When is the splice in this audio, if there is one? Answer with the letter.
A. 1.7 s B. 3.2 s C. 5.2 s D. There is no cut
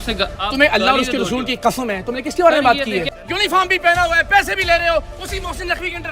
B